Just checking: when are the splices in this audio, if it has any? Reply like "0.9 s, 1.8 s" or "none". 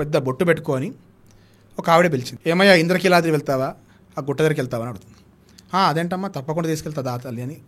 2.3 s